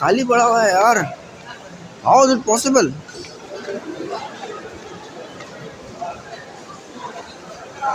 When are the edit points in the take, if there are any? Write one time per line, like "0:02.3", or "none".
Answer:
none